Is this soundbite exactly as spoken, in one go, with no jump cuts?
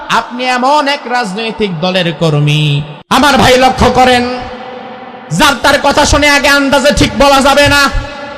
no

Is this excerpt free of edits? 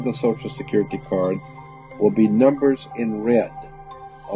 yes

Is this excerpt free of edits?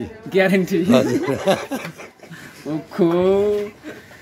yes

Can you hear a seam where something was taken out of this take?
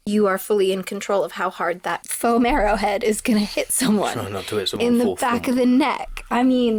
no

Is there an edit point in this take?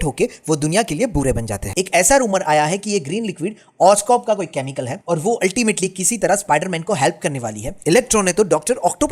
yes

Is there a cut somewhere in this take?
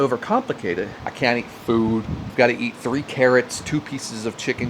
yes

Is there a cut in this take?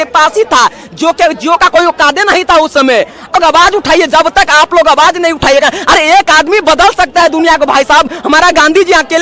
yes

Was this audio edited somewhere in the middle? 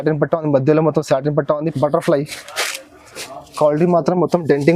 yes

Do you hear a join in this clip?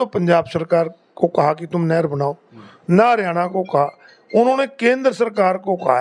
no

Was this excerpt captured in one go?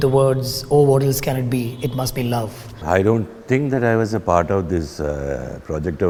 yes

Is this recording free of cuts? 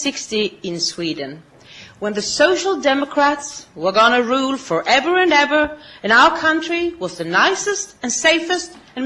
no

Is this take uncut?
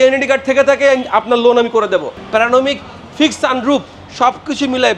no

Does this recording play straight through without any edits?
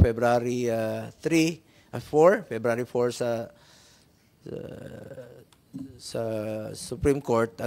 yes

